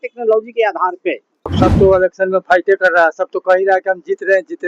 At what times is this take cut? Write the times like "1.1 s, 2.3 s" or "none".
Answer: 1.5 s